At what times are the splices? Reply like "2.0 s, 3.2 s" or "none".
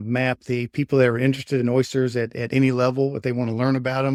none

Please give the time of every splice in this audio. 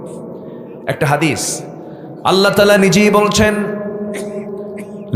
none

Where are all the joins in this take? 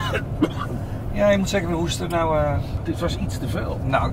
2.8 s

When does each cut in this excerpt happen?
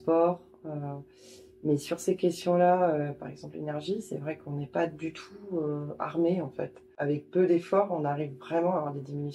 6.9 s

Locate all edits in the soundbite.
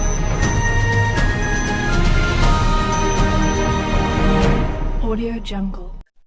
none

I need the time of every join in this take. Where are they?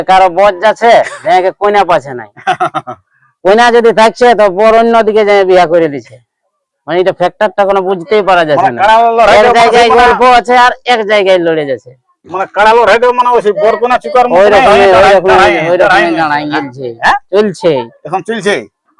none

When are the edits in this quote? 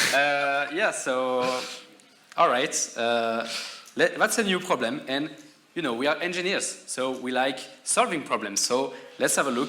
none

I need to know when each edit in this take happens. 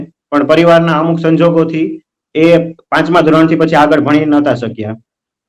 none

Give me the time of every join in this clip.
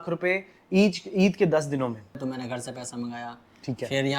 2.1 s

